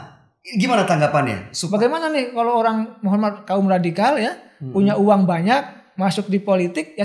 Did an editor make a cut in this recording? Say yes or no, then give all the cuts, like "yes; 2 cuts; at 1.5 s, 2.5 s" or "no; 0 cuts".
yes; 1 cut; at 1.5 s